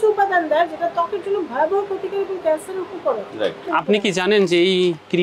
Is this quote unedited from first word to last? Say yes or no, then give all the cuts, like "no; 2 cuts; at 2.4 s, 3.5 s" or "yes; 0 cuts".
no; 1 cut; at 3.6 s